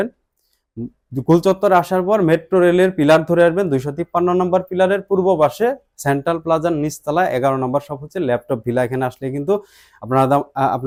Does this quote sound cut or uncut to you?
uncut